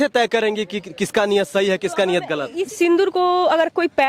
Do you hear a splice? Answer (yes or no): yes